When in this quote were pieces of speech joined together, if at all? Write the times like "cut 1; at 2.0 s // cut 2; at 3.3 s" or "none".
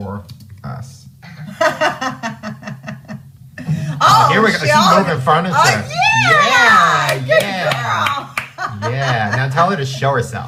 none